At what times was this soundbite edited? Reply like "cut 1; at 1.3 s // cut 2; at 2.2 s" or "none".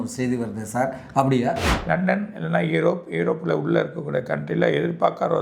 cut 1; at 1.7 s